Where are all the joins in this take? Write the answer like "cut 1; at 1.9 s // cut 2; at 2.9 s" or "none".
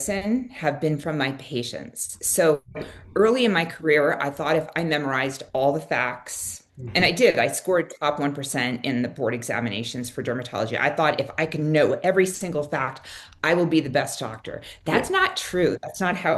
none